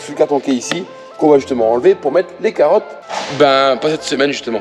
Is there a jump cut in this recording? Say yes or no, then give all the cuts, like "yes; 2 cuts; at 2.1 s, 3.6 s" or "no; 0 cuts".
no; 0 cuts